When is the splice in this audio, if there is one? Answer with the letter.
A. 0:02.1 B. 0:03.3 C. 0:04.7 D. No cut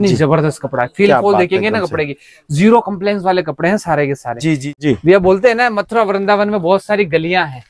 C